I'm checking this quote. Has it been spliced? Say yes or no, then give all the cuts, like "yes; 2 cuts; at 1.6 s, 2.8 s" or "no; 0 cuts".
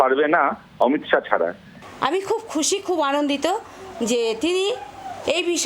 yes; 1 cut; at 1.7 s